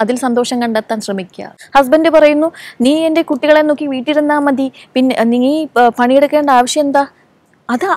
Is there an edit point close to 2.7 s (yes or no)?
no